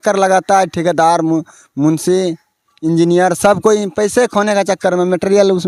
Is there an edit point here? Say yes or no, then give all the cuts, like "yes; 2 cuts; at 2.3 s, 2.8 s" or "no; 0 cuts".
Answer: no; 0 cuts